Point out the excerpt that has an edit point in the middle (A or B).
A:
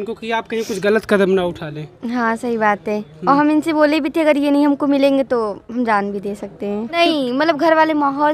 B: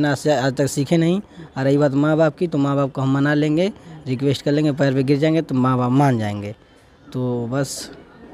A